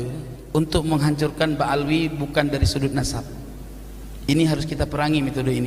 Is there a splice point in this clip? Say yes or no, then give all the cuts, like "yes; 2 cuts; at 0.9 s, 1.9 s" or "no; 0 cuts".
no; 0 cuts